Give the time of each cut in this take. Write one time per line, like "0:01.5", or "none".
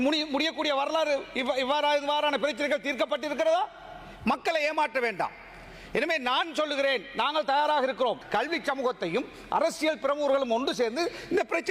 0:08.2